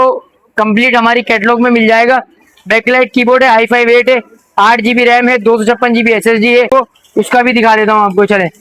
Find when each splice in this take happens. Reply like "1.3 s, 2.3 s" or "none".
6.7 s